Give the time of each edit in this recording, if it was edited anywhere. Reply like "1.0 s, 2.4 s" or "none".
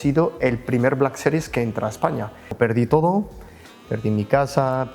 2.6 s

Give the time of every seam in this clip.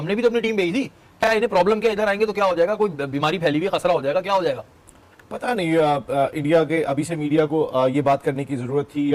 none

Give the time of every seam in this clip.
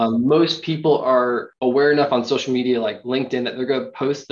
1.5 s

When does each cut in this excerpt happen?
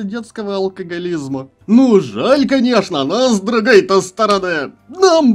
1.5 s

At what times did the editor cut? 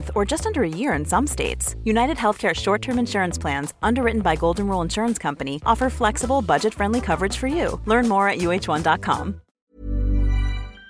9.5 s

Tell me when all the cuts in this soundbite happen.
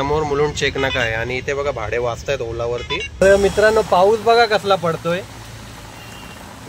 3.2 s

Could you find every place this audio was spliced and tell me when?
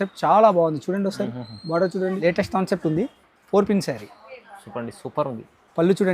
2.2 s

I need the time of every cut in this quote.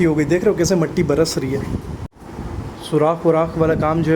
2.1 s

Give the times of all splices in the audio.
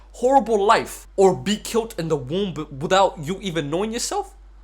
1.0 s

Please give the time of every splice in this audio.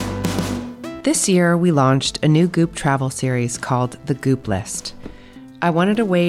1.0 s

